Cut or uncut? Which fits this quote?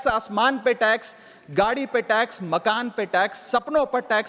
uncut